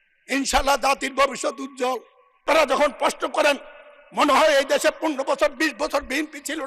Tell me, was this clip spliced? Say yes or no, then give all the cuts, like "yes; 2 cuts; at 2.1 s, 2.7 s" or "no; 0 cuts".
yes; 1 cut; at 2.4 s